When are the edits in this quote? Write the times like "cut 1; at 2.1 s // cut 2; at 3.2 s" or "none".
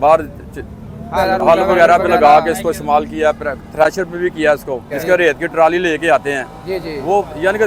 cut 1; at 1.2 s // cut 2; at 4.9 s